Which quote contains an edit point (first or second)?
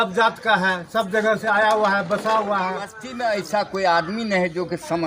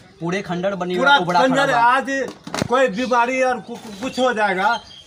first